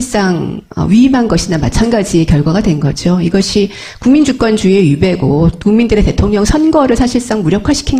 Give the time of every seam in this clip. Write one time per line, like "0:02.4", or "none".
none